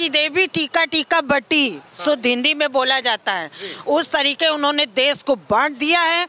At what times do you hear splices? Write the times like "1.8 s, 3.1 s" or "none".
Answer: none